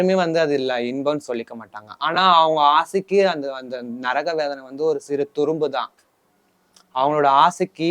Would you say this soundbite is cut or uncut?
uncut